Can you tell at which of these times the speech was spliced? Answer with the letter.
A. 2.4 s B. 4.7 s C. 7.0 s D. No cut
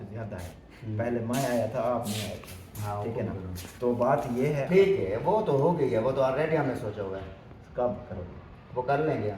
B